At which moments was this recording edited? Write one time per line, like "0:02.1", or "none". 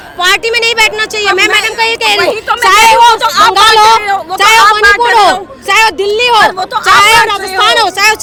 none

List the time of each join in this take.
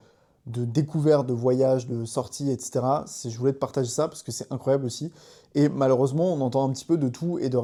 none

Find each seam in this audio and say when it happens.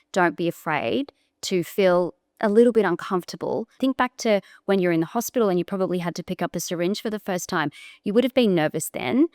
0:03.8

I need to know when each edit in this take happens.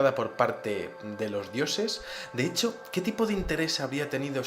0:01.3

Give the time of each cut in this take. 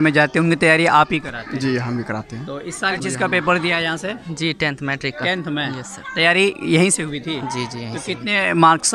0:03.0

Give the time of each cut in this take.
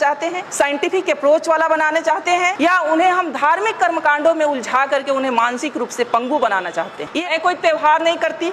0:07.1

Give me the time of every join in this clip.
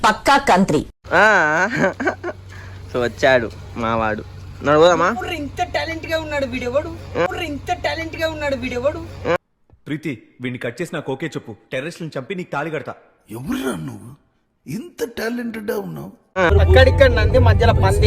0:16.5

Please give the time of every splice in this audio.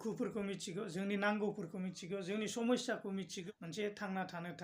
0:03.4

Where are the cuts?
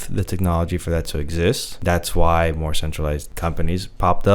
0:01.7
0:03.3

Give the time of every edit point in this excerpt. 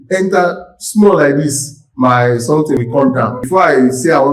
0:03.0

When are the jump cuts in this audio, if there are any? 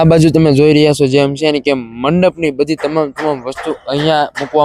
none

